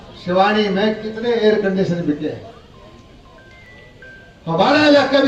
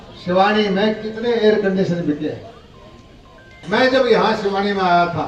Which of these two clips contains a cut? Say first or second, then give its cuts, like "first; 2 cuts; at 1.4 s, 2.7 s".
second; 1 cut; at 3.5 s